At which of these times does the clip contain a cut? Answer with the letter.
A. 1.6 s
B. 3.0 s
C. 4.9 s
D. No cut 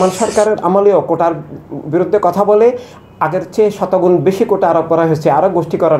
D